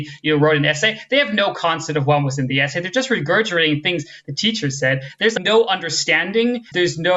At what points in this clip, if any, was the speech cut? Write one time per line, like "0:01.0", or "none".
none